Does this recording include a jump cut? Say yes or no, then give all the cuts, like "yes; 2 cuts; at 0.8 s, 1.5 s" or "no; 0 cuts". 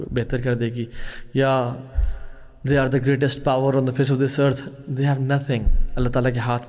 no; 0 cuts